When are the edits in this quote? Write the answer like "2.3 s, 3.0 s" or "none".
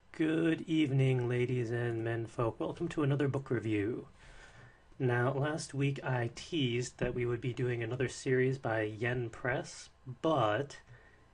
2.3 s